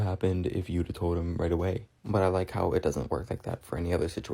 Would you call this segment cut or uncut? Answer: cut